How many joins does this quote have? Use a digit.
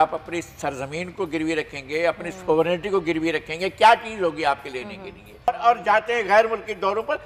1